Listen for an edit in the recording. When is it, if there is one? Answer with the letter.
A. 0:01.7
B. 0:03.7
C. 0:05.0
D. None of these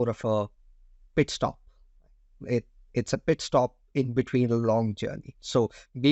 D